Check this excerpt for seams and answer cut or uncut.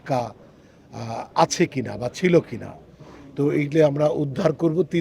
uncut